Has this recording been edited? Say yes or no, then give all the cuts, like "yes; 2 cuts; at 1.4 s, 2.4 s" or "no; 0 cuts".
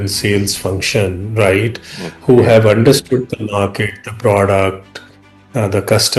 no; 0 cuts